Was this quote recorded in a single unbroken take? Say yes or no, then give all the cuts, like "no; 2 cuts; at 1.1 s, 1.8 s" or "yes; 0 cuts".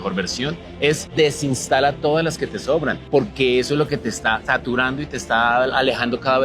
no; 3 cuts; at 1.1 s, 3.0 s, 4.4 s